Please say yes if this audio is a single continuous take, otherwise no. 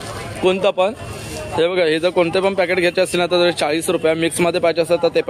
yes